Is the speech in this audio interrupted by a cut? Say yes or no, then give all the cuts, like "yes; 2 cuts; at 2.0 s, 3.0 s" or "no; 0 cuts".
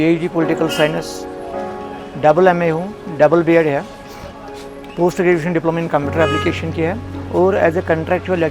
no; 0 cuts